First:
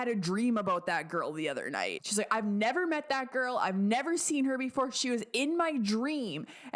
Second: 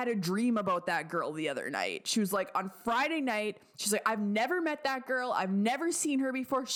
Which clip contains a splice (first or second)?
first